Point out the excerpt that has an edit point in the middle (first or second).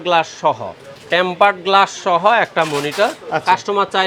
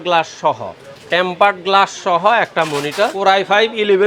second